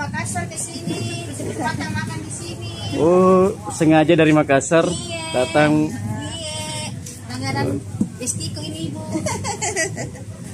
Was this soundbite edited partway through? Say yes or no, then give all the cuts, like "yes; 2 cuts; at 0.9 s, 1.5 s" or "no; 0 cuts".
no; 0 cuts